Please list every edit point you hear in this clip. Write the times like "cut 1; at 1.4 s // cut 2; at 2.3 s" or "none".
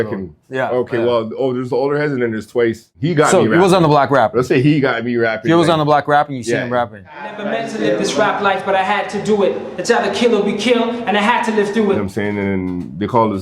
cut 1; at 2.9 s // cut 2; at 12.0 s